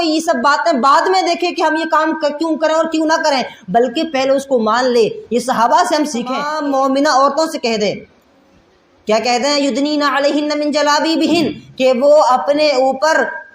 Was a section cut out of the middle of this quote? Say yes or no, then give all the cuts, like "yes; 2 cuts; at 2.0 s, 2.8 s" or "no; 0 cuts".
yes; 1 cut; at 6.5 s